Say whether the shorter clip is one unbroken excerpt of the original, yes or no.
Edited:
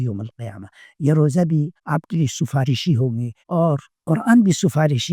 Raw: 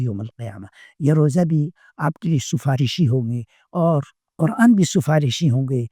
no